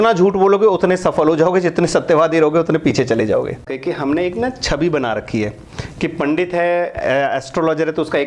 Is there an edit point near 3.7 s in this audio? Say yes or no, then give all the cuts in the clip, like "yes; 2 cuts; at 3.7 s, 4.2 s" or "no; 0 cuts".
yes; 1 cut; at 3.7 s